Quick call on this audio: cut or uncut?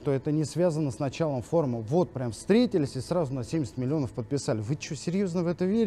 uncut